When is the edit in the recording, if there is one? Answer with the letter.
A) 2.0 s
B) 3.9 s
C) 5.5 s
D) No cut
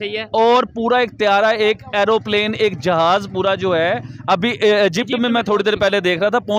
D